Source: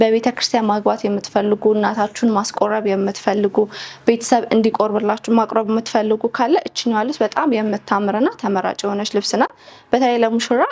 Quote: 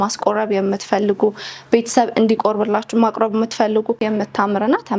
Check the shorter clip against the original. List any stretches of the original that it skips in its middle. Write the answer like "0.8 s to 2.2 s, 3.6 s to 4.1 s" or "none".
6.4 s to 7.5 s